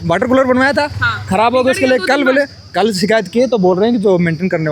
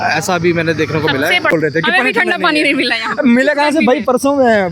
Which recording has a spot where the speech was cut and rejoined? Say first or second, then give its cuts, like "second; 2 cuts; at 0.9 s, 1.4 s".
second; 1 cut; at 1.5 s